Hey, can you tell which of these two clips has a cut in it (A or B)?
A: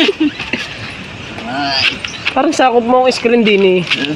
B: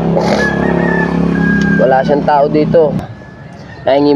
B